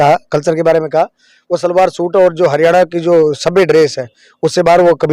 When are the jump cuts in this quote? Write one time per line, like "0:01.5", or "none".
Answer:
none